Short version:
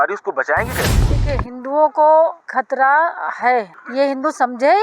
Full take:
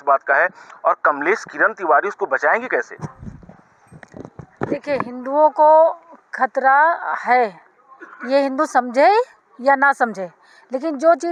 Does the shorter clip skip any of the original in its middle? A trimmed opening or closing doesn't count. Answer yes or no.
yes